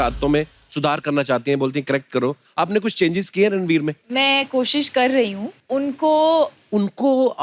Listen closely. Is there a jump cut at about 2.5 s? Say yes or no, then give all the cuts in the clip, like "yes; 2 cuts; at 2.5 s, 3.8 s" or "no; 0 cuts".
no; 3 cuts; at 4.0 s, 5.5 s, 6.6 s